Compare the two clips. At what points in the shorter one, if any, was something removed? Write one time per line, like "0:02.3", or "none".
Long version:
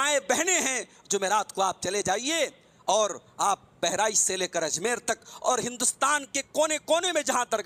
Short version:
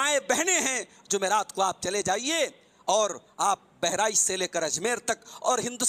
none